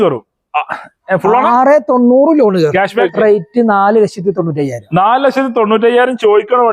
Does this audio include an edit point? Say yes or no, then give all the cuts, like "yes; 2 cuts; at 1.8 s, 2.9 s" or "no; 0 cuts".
yes; 1 cut; at 3.0 s